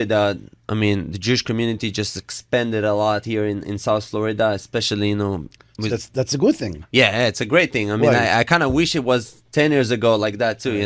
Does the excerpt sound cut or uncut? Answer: uncut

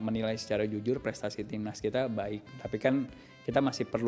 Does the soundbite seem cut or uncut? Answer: uncut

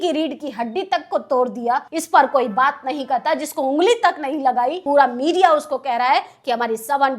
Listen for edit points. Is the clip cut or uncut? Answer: cut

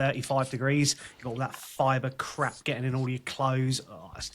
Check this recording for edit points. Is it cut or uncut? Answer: uncut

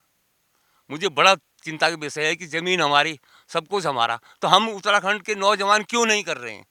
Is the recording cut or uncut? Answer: uncut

